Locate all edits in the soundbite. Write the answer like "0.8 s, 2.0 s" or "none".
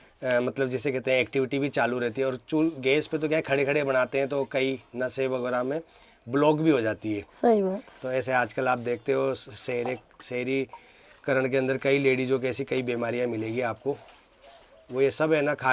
none